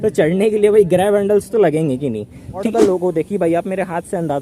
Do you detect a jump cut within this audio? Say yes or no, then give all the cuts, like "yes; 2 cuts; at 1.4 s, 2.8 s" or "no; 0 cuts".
yes; 1 cut; at 2.7 s